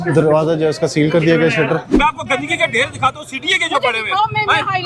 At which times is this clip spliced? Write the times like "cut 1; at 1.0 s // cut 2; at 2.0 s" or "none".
cut 1; at 1.9 s